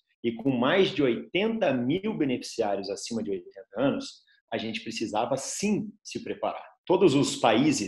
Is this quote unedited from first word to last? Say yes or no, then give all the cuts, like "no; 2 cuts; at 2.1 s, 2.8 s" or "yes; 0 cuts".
no; 1 cut; at 6.7 s